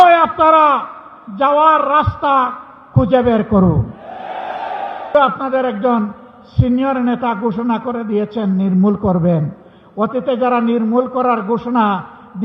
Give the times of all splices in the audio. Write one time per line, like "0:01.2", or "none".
0:05.1